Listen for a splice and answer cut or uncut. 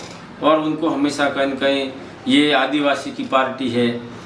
uncut